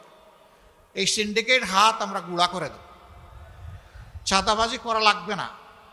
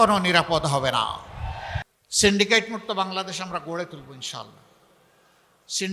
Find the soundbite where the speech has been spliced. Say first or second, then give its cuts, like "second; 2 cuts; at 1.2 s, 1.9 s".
second; 1 cut; at 1.8 s